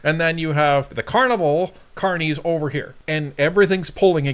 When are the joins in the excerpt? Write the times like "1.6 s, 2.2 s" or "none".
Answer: 1.0 s, 2.9 s